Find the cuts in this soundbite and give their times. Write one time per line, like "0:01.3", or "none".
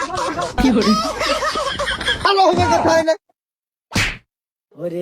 0:02.2